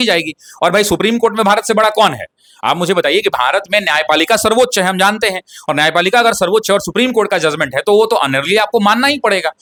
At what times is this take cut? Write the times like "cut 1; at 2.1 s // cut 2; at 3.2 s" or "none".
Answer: none